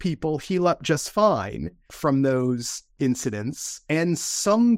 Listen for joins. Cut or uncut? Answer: cut